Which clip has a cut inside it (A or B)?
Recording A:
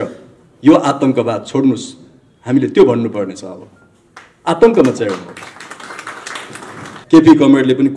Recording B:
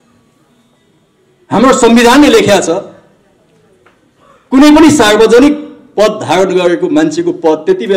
A